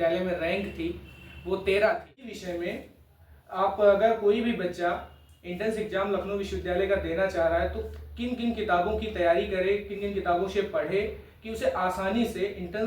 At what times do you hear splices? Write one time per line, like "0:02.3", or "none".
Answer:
0:02.4